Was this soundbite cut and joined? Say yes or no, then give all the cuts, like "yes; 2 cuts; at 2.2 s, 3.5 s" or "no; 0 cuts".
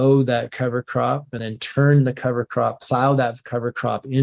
yes; 1 cut; at 1.4 s